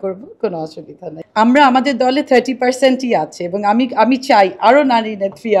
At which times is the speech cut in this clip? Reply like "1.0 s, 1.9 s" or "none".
1.2 s